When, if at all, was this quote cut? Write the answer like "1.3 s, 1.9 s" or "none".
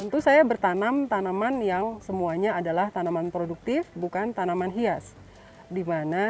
none

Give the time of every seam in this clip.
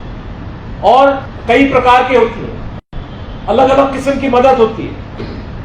1.3 s

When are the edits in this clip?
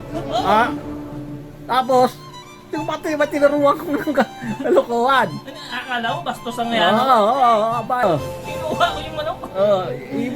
8.0 s

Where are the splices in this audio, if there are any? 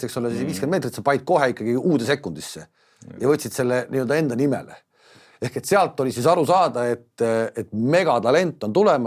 none

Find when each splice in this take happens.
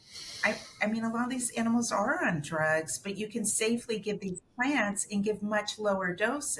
none

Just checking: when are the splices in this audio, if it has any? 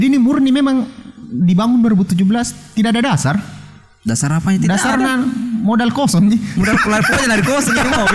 none

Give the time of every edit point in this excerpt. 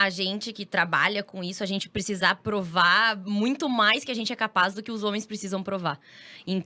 none

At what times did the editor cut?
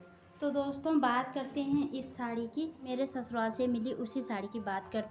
2.9 s

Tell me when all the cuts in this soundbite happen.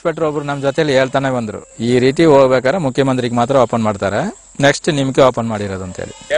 none

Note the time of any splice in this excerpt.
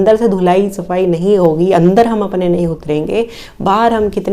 none

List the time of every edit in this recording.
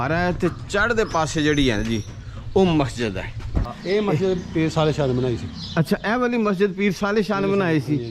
3.7 s

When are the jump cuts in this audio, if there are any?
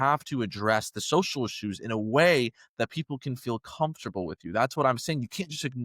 none

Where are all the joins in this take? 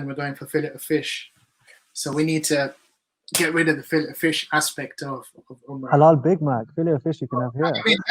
none

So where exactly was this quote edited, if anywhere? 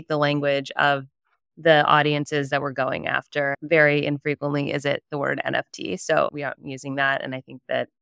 3.6 s

